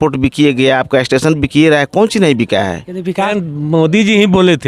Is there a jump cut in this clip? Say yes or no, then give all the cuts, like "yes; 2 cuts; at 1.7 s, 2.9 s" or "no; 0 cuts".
yes; 1 cut; at 3.3 s